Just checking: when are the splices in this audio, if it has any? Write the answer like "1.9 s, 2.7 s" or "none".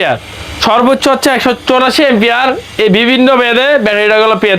none

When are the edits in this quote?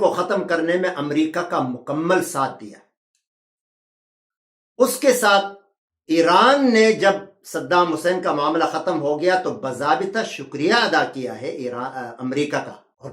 none

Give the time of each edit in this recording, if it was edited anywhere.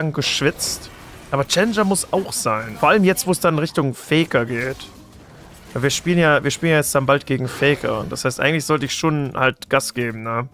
none

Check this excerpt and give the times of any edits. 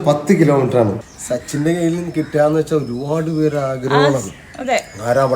1.2 s

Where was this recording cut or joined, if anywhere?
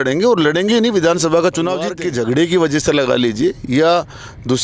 1.9 s

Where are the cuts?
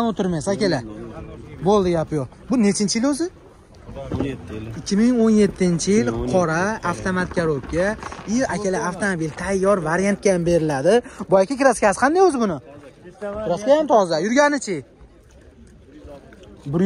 none

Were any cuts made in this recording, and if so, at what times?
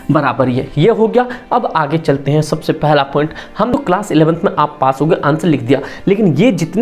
3.7 s

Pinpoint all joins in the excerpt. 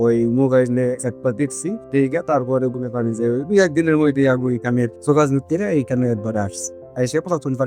none

